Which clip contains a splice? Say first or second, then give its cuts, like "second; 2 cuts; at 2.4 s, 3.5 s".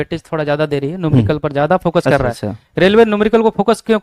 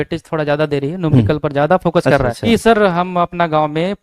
second; 1 cut; at 2.4 s